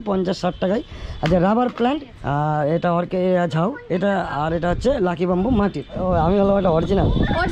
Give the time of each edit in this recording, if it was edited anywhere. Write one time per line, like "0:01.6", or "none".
0:02.1
0:06.0